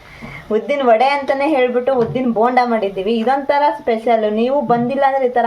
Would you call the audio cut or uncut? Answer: uncut